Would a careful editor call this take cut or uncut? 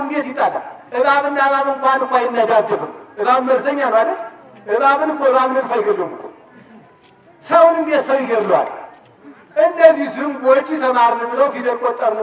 uncut